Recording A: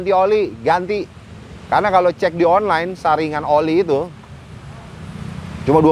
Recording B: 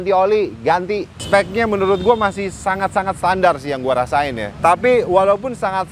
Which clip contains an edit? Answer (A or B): B